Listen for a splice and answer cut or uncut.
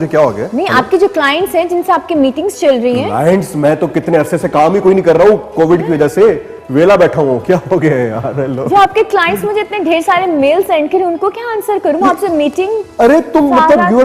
uncut